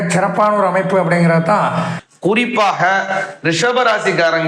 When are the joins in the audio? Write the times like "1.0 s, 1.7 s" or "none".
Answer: 2.0 s